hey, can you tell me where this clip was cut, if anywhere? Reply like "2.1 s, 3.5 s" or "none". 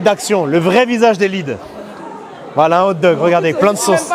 none